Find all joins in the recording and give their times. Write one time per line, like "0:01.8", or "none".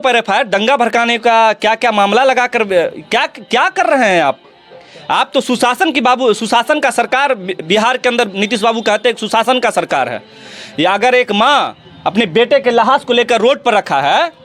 none